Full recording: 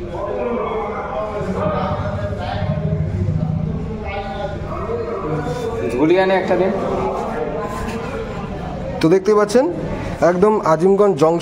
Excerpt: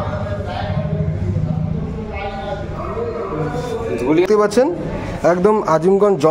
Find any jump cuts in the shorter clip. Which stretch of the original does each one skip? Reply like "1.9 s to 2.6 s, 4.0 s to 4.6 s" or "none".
6.2 s to 9.2 s